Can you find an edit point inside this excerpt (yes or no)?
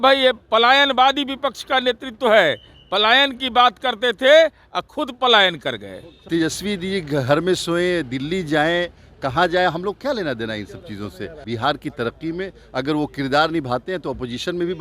yes